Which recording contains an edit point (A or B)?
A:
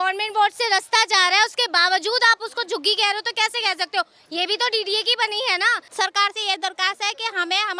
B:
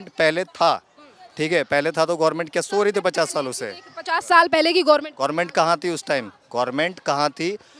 A